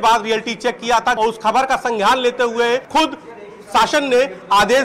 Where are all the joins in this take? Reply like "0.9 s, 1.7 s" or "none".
1.2 s, 2.9 s